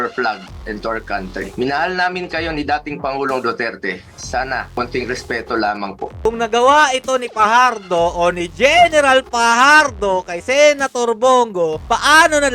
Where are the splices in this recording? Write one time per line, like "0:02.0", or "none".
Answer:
0:06.1